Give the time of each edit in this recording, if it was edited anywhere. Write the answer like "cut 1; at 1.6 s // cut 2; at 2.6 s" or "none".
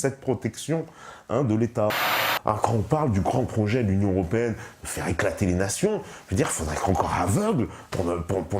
cut 1; at 2.1 s